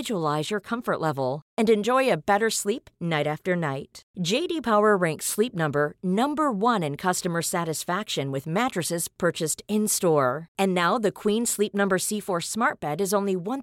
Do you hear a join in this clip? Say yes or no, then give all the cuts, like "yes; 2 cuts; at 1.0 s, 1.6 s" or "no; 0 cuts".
no; 0 cuts